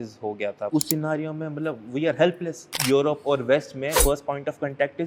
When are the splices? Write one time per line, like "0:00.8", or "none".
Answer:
0:00.7
0:02.7
0:04.0